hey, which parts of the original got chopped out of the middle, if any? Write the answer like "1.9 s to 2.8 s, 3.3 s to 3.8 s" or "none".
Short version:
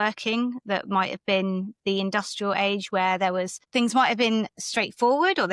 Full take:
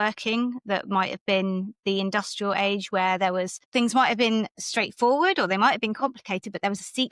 none